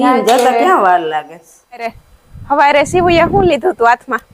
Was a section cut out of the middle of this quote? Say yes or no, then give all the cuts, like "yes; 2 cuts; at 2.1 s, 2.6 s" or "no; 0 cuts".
yes; 1 cut; at 2.0 s